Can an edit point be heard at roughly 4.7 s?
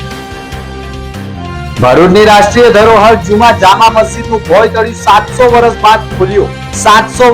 no; 1 cut; at 1.7 s

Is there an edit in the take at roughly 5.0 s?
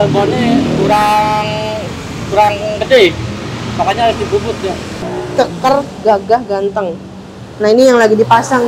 yes; 1 cut; at 5.0 s

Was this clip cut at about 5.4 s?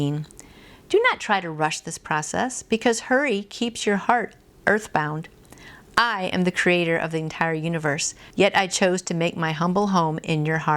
no; 1 cut; at 8.2 s

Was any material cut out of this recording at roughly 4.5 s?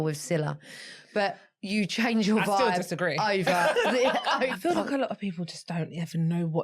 yes; 1 cut; at 4.5 s

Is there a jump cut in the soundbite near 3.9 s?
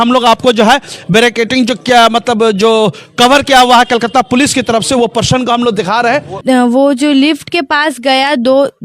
no; 1 cut; at 6.4 s

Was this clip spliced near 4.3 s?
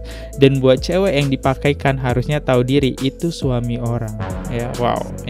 yes; 1 cut; at 4.3 s

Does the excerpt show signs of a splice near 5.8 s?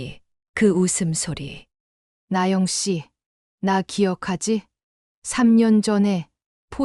no; 1 cut; at 2.1 s

